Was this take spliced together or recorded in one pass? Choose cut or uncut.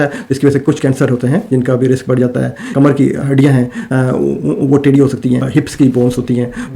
cut